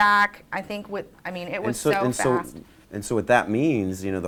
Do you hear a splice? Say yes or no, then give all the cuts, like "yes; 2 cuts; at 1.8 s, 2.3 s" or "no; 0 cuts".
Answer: no; 0 cuts